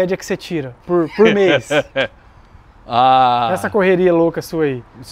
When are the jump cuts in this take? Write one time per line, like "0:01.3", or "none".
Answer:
none